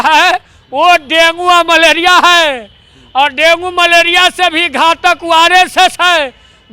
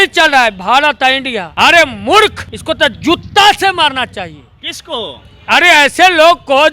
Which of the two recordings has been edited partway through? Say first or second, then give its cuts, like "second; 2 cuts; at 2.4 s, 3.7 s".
second; 2 cuts; at 1.4 s, 2.5 s